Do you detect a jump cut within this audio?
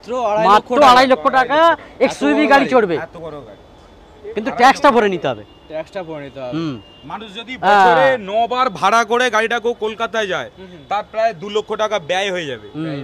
no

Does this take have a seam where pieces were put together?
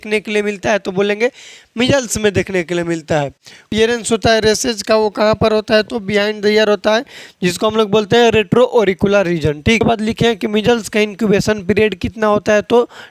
yes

